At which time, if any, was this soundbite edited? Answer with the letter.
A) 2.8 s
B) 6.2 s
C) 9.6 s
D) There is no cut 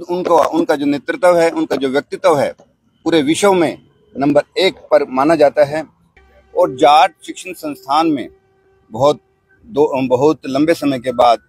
B